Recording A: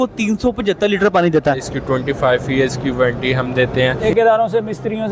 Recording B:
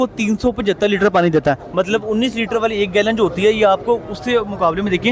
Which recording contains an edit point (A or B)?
A